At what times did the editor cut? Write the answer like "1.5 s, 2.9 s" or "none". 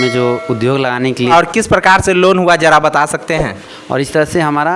1.3 s, 3.7 s

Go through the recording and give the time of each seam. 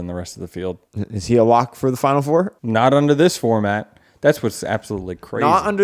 0.9 s, 2.5 s

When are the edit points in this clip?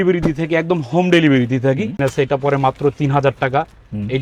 2.0 s

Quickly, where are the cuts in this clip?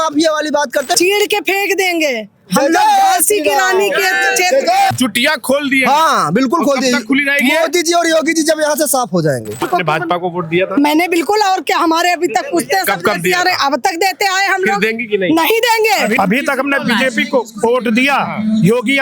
1.0 s, 4.9 s, 9.6 s, 16.1 s

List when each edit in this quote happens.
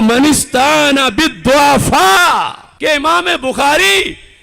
2.6 s

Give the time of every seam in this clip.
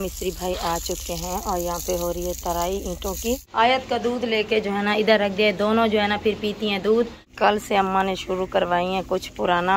3.5 s, 7.2 s

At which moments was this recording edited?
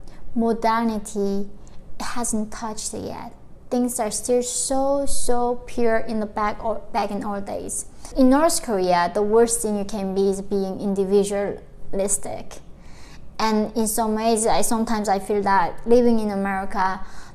8.1 s

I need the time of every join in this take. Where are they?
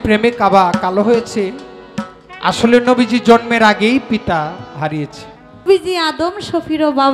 5.6 s

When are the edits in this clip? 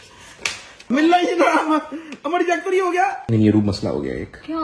0.9 s, 3.2 s

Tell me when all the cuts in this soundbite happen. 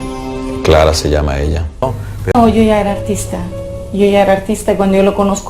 2.1 s

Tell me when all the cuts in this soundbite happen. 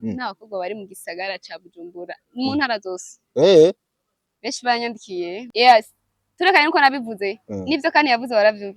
5.4 s

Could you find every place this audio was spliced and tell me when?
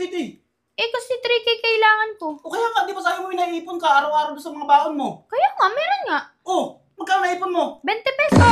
none

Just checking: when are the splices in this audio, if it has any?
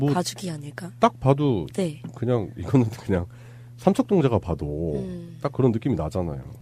1.3 s

